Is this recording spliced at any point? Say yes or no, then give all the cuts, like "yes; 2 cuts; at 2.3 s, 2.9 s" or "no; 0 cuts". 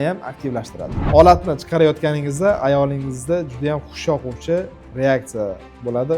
yes; 1 cut; at 1.0 s